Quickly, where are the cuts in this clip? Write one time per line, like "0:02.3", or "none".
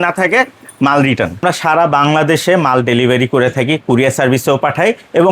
0:01.4